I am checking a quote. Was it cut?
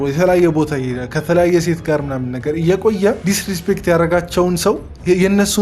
yes; 1 cut; at 3.2 s

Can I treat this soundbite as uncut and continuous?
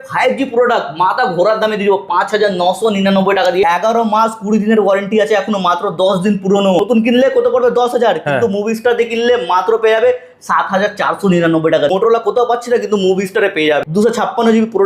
no; 4 cuts; at 3.6 s, 6.8 s, 11.9 s, 13.8 s

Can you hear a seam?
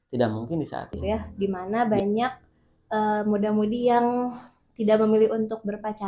yes; 1 cut; at 1.3 s

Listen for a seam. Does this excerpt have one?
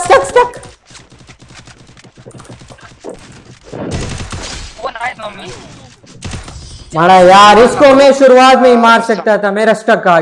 no; 0 cuts

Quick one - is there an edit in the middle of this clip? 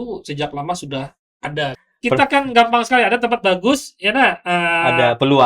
yes; 1 cut; at 1.8 s

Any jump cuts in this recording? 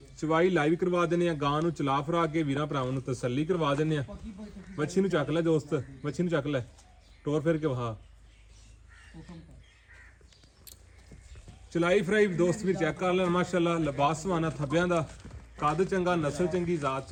no; 0 cuts

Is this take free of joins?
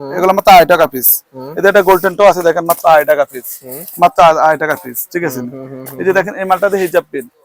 yes; 0 cuts

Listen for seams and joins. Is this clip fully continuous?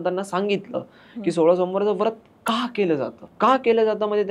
no; 1 cut; at 3.2 s

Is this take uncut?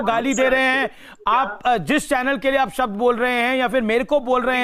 yes; 0 cuts

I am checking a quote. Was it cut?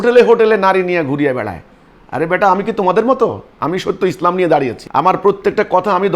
yes; 2 cuts; at 3.5 s, 4.8 s

